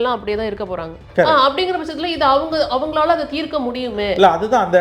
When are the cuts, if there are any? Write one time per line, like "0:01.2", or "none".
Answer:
0:01.0